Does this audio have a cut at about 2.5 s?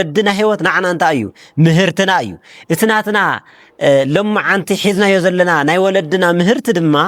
no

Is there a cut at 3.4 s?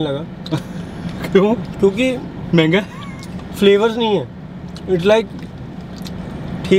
no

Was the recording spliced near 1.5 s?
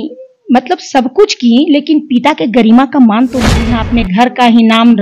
no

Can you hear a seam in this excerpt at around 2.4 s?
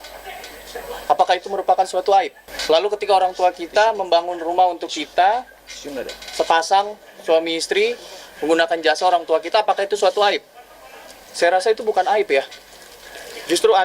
yes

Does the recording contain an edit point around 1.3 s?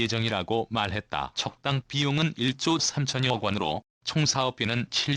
yes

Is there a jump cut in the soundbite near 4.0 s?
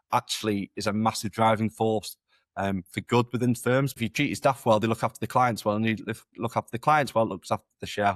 yes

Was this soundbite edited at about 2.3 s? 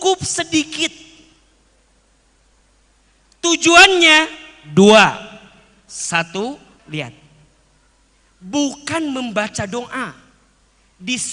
no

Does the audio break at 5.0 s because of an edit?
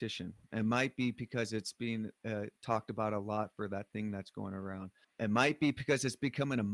yes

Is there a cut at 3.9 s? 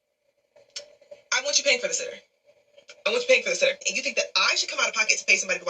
yes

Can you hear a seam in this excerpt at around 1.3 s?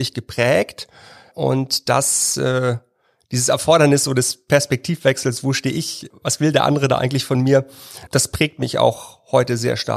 yes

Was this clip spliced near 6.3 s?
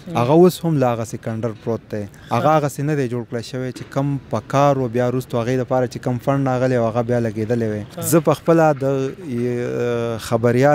no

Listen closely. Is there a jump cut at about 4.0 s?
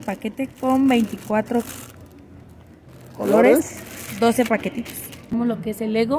no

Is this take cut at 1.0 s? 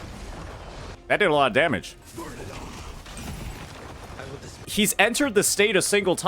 yes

